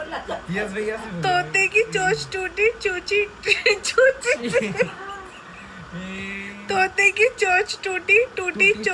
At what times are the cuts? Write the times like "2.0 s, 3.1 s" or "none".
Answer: none